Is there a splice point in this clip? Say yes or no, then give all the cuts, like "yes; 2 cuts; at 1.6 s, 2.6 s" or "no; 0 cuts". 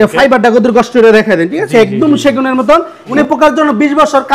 yes; 1 cut; at 3.1 s